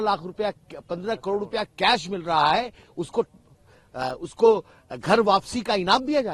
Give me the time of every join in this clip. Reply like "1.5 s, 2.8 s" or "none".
none